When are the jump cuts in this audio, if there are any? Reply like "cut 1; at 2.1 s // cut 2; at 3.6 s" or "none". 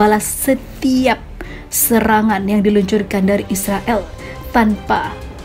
none